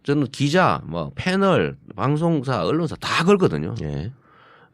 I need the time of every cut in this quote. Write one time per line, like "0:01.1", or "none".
none